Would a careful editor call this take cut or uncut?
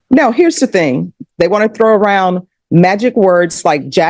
cut